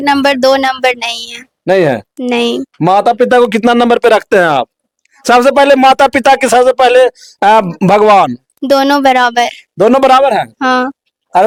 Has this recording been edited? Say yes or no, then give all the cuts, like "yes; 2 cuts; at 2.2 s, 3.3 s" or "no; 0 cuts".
no; 0 cuts